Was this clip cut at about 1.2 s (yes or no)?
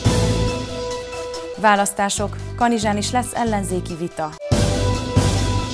no